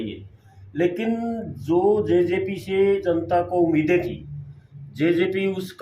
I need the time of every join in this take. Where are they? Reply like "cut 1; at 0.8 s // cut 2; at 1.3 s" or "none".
none